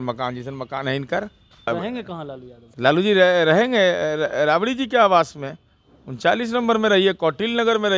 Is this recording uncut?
no; 1 cut; at 1.7 s

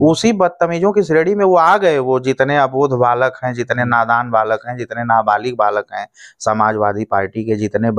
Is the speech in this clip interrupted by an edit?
no; 0 cuts

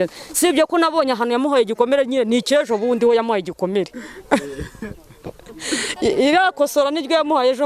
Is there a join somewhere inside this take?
no; 0 cuts

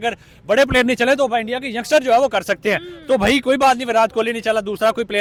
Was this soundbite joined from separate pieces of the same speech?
no; 0 cuts

